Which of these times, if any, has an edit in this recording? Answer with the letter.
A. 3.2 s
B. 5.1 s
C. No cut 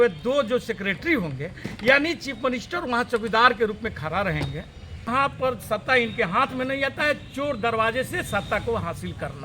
B